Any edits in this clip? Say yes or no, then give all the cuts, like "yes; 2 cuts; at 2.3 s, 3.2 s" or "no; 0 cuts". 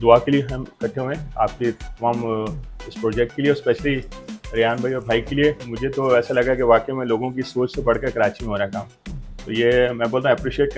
no; 0 cuts